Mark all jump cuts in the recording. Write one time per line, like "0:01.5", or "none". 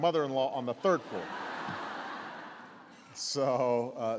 0:01.6

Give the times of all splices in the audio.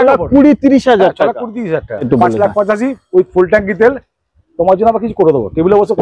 0:02.1

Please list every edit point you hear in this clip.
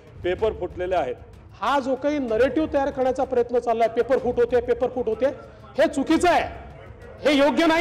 0:01.2

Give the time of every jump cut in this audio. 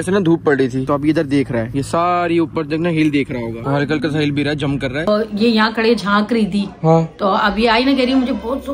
0:05.1

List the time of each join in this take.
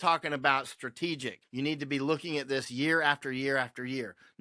0:01.4

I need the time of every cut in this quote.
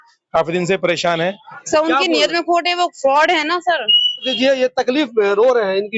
0:01.5
0:04.3

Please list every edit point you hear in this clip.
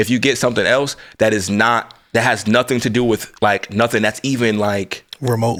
none

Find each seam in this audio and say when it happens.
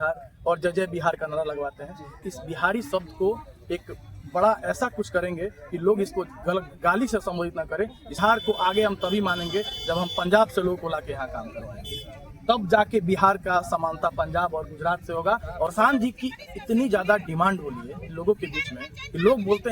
0:02.2
0:08.2
0:15.7

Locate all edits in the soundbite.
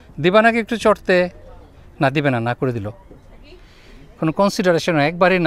none

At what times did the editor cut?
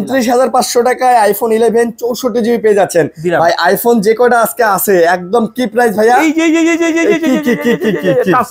none

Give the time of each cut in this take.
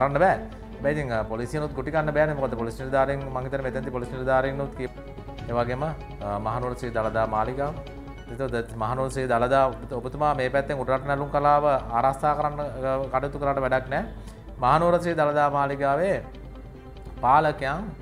0:04.8

